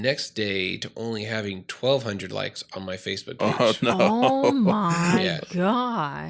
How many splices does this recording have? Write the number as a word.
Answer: zero